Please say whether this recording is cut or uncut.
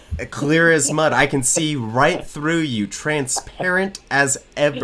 uncut